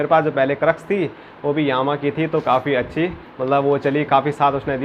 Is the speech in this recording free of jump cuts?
yes; 0 cuts

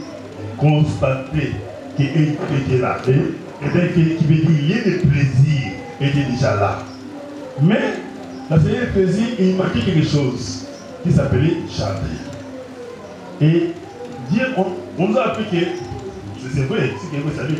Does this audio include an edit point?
no; 0 cuts

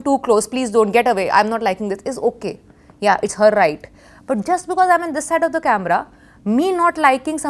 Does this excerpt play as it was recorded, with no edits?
yes; 0 cuts

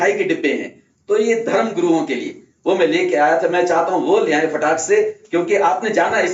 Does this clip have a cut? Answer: no; 0 cuts

